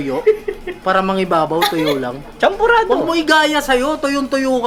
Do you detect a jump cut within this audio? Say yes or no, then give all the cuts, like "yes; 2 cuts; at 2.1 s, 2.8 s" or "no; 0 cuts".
no; 0 cuts